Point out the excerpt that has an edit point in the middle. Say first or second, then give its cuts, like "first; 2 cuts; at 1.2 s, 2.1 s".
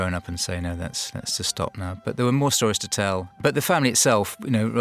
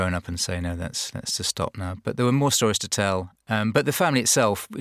first; 1 cut; at 3.4 s